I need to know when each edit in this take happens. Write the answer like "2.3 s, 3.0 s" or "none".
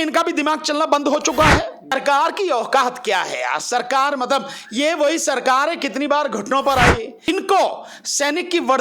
1.9 s, 7.1 s